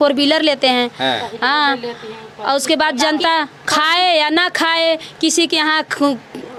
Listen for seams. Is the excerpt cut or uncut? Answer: uncut